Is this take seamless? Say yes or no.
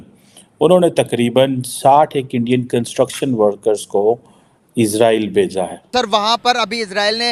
no